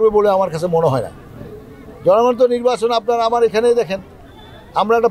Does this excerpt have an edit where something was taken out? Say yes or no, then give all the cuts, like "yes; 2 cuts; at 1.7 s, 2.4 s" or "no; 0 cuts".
no; 0 cuts